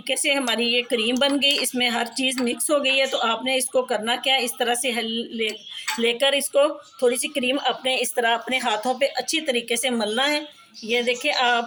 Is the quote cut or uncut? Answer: uncut